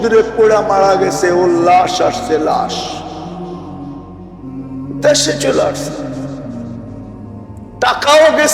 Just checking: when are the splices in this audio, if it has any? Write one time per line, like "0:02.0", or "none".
0:06.0
0:07.5